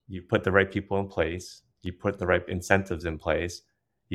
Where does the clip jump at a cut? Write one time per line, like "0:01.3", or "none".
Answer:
none